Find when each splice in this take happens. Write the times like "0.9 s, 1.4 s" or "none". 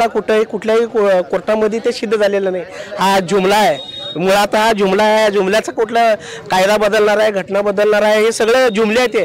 none